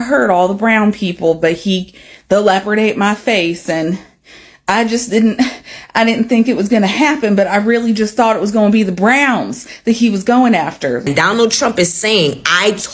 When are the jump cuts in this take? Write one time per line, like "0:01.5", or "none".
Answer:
0:11.0